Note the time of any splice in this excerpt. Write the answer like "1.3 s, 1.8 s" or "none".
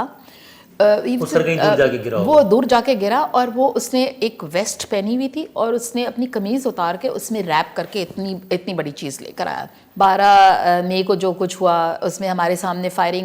9.8 s